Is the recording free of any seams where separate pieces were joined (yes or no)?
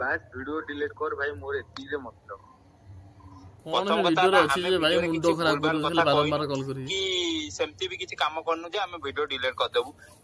yes